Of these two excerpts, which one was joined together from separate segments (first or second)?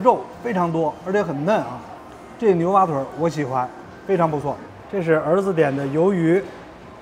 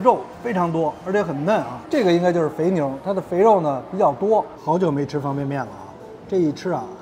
second